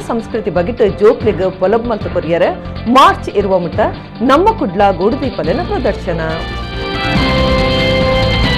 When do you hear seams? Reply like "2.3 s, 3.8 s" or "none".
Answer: none